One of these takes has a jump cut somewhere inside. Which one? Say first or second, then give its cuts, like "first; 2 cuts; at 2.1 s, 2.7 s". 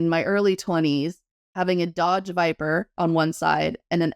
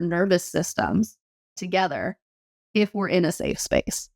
first; 1 cut; at 2.9 s